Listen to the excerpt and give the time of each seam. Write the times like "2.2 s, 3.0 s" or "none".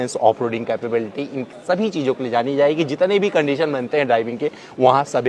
none

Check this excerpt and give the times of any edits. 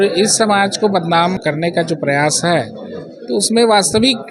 1.4 s

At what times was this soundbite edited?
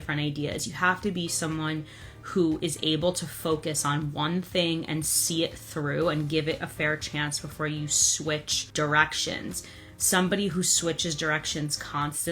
8.6 s

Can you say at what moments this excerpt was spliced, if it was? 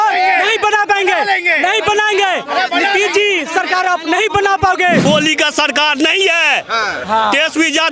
5.0 s

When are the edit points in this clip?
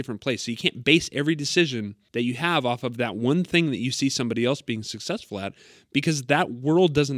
2.0 s

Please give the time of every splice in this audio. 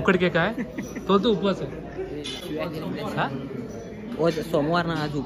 2.4 s

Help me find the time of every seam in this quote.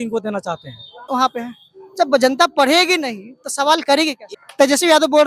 1.1 s, 4.2 s

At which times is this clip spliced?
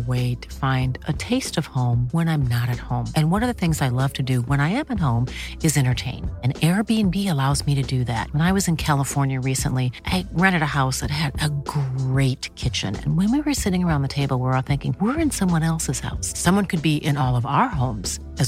none

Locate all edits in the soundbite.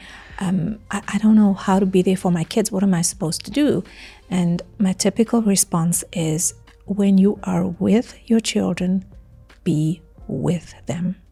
none

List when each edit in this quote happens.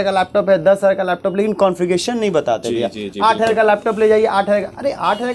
none

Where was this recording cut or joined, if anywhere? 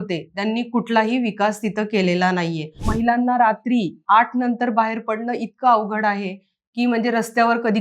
2.9 s

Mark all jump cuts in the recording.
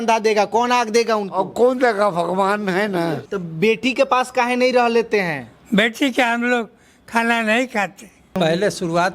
3.3 s, 8.4 s

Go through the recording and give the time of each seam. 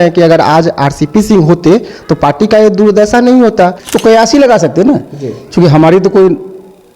3.8 s

